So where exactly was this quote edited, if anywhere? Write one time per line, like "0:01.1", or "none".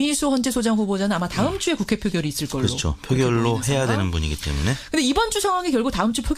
0:03.6